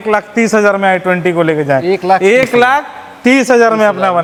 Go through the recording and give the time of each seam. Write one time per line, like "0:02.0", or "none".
none

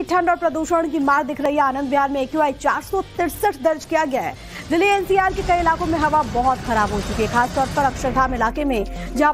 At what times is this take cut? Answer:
0:03.8

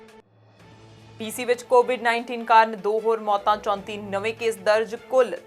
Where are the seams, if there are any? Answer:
0:01.2

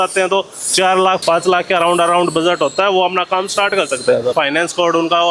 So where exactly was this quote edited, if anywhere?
0:01.2
0:04.3

